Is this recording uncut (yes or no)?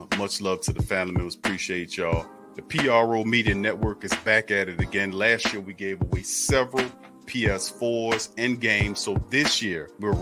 yes